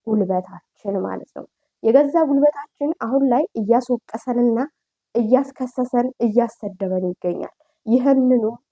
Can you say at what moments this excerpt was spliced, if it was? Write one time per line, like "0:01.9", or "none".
none